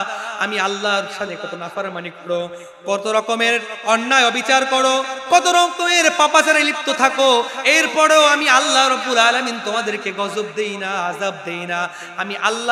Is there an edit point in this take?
no; 0 cuts

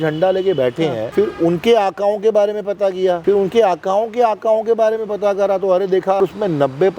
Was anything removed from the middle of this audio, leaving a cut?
yes; 3 cuts; at 1.0 s, 3.2 s, 6.2 s

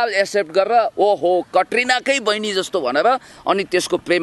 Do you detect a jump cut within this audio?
no; 0 cuts

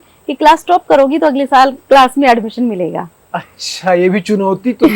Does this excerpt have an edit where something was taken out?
no; 0 cuts

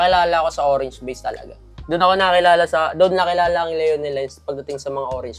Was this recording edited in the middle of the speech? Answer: no; 0 cuts

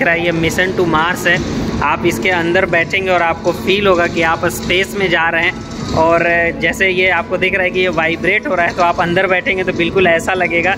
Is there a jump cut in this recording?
no; 0 cuts

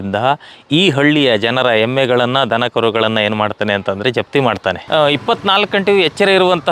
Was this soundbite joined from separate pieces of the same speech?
yes; 1 cut; at 4.8 s

